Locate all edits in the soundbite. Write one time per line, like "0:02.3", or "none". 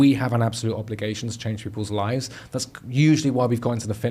none